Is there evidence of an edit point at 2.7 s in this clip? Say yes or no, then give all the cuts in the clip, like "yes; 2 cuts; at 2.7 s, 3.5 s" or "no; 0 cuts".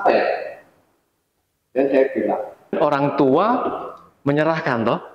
yes; 1 cut; at 2.7 s